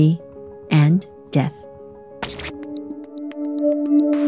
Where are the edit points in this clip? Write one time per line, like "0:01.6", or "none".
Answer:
0:02.0